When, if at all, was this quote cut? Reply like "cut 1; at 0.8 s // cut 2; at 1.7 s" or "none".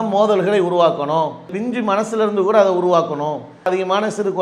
cut 1; at 1.5 s // cut 2; at 3.7 s